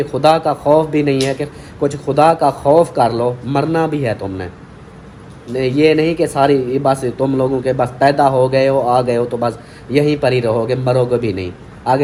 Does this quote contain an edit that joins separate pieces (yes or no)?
no